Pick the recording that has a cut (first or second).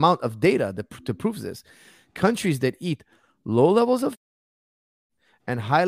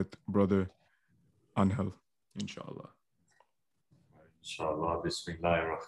first